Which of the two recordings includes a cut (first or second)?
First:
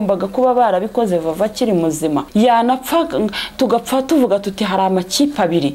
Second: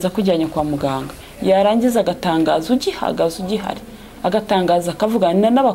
first